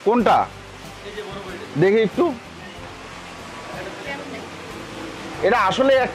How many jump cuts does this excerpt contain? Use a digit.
0